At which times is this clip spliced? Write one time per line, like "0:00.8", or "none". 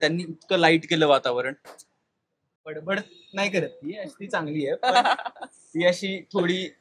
0:02.7